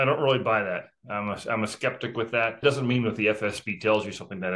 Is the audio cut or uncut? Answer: cut